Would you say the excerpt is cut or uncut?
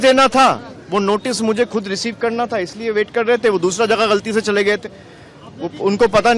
uncut